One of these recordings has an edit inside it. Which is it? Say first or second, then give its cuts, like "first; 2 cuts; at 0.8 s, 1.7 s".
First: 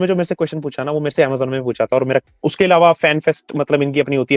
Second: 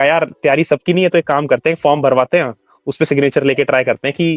first; 1 cut; at 2.3 s